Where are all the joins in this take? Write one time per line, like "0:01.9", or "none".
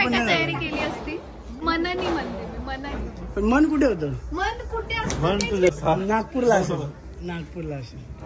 0:01.6
0:05.7